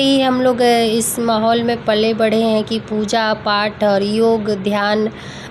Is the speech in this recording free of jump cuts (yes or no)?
yes